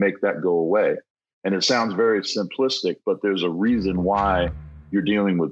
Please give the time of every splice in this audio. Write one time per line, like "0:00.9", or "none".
none